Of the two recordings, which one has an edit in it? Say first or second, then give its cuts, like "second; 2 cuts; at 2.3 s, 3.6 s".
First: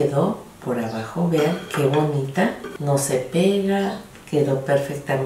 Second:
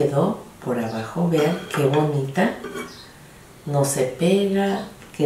first; 1 cut; at 2.7 s